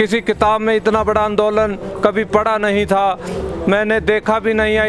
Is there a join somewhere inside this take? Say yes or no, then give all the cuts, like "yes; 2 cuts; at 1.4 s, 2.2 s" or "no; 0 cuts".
no; 0 cuts